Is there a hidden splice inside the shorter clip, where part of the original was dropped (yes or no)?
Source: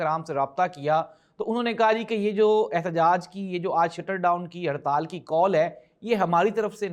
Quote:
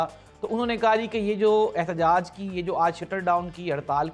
no